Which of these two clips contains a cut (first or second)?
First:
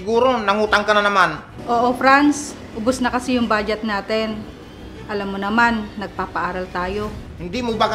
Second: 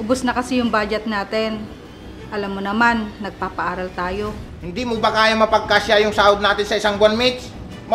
first